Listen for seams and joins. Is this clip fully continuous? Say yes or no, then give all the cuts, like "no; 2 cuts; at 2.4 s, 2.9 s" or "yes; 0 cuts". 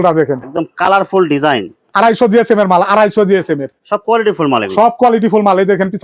yes; 0 cuts